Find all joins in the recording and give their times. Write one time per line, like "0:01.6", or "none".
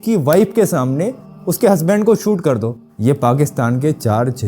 0:02.9